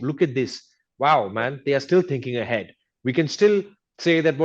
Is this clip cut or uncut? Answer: uncut